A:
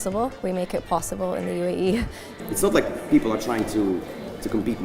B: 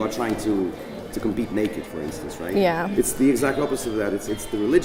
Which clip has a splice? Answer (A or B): A